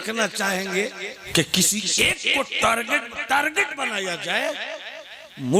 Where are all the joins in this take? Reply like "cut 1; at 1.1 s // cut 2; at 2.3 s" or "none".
cut 1; at 1.1 s